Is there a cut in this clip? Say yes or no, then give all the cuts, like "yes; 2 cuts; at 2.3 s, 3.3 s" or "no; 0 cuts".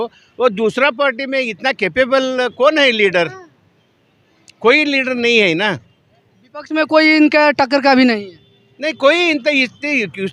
no; 0 cuts